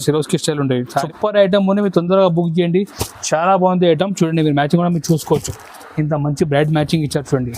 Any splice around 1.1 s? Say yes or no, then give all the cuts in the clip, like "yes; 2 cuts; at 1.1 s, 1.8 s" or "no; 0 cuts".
yes; 1 cut; at 1.1 s